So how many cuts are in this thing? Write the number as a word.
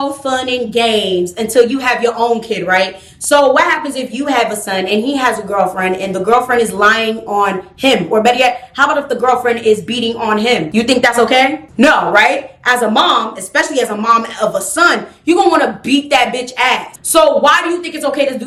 zero